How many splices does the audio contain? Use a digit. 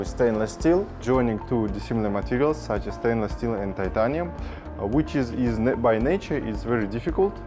1